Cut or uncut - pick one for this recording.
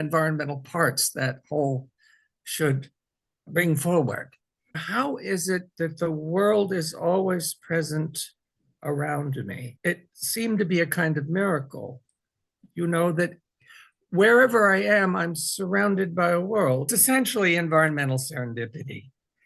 cut